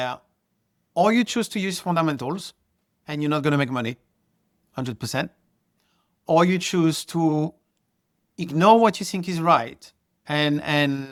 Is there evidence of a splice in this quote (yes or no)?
no